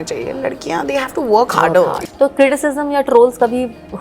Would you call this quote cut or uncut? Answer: cut